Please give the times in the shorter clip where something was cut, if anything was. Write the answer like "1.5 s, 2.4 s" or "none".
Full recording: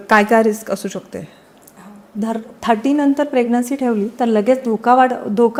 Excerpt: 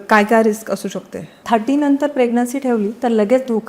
1.3 s